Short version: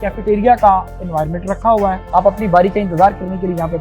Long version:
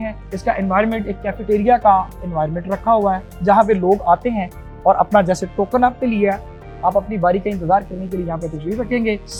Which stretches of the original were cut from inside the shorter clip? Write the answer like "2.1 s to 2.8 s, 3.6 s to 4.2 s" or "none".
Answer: 3.2 s to 6.7 s

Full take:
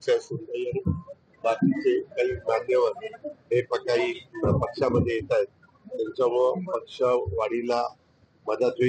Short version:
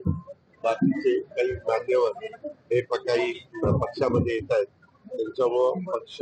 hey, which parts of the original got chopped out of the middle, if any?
none

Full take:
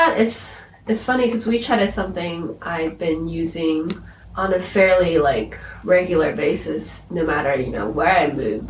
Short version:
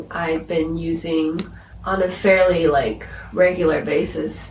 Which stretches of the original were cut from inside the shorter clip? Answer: none

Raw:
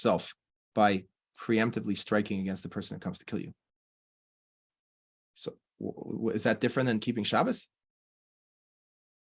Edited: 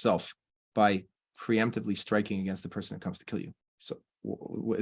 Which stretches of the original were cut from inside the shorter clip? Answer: 3.7 s to 5.2 s

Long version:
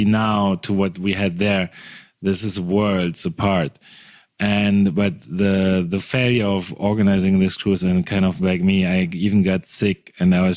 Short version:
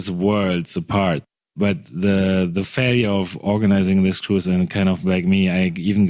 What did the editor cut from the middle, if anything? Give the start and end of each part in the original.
4.1 s to 4.9 s

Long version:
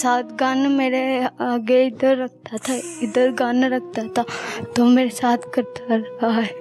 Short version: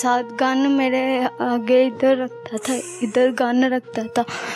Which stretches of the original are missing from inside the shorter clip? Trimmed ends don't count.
none

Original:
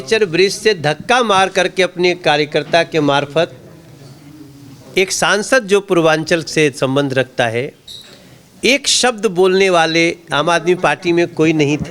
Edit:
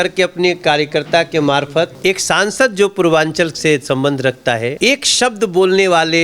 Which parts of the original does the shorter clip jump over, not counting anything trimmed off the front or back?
3.5 s to 4.9 s, 7.7 s to 8.6 s

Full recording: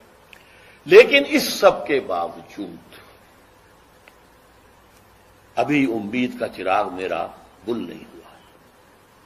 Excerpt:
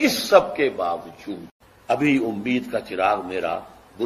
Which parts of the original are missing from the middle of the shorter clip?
3.3 s to 5.7 s

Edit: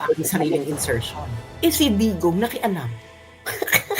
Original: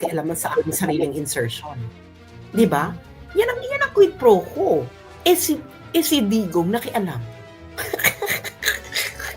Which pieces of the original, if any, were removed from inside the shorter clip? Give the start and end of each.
1.9 s to 5.7 s

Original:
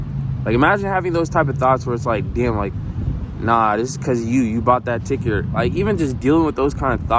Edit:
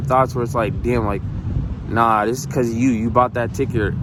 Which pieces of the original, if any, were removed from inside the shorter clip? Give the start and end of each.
none

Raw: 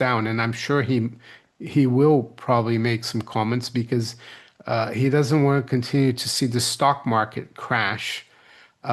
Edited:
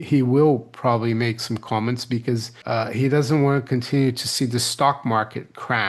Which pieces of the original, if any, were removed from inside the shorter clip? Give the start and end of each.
4.2 s to 4.5 s

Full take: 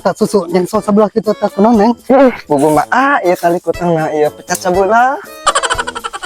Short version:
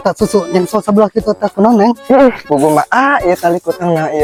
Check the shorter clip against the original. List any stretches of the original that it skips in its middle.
none

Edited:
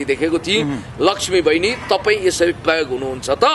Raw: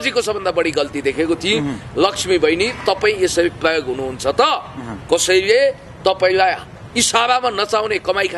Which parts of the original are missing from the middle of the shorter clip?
none

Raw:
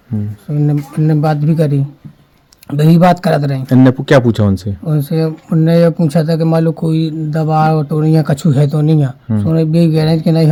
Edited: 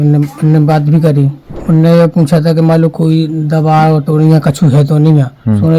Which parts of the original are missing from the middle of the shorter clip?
2.1 s to 5.4 s

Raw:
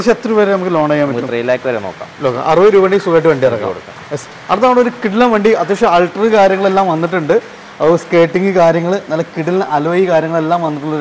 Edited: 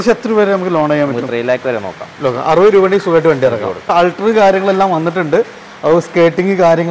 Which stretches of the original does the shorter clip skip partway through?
3.9 s to 5.9 s

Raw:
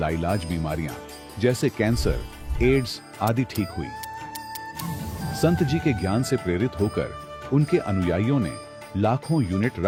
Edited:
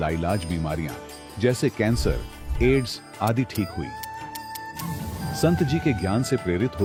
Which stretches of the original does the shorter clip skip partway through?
none

